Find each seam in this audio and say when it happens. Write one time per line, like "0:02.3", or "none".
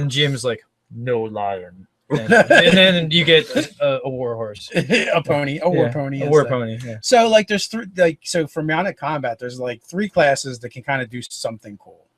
0:09.0